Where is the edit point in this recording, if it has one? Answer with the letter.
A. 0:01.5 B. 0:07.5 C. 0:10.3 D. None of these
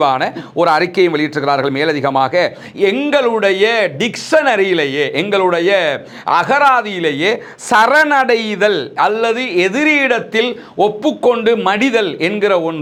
D